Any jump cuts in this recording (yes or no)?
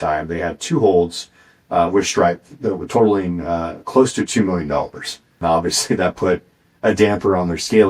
yes